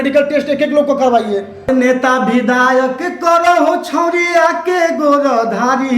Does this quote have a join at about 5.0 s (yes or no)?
no